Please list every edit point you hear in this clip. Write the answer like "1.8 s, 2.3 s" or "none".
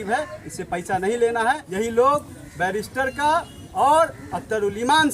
1.6 s